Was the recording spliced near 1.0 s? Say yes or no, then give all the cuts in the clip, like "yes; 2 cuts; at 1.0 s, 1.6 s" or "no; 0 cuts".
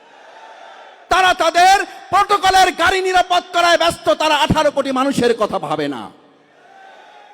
yes; 1 cut; at 1.0 s